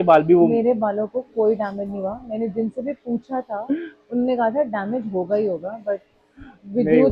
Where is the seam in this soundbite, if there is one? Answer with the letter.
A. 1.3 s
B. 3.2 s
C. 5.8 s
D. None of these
D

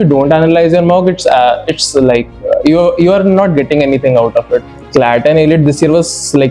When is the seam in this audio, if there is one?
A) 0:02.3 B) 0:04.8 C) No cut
B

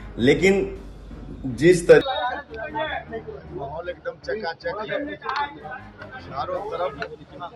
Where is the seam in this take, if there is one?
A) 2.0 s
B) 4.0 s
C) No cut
A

